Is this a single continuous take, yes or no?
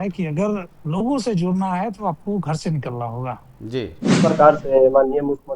no